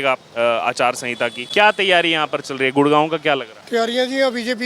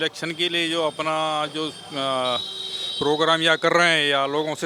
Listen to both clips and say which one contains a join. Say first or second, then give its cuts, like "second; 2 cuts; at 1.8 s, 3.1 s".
first; 2 cuts; at 1.4 s, 3.5 s